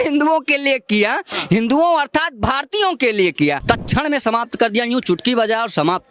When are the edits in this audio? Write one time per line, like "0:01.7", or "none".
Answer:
0:03.6